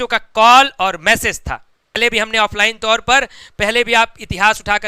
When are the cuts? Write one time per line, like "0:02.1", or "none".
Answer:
0:02.0